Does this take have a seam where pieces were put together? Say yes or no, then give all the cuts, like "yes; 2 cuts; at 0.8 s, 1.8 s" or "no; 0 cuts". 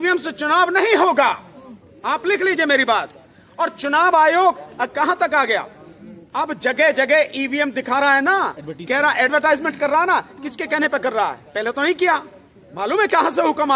no; 0 cuts